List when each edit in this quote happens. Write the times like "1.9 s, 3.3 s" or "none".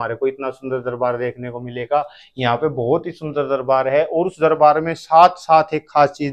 none